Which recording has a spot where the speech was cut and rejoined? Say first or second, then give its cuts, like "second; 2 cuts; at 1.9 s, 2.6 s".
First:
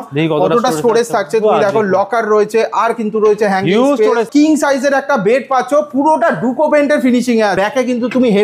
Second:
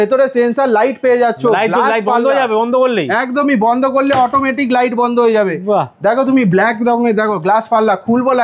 first; 2 cuts; at 4.3 s, 7.5 s